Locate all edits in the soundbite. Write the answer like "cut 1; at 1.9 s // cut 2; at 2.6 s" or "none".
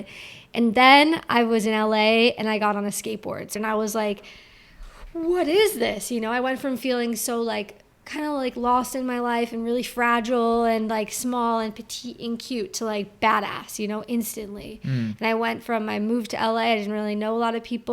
cut 1; at 3.5 s